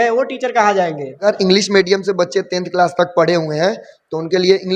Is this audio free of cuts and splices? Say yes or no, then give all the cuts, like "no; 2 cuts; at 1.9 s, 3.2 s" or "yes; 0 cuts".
no; 1 cut; at 1.2 s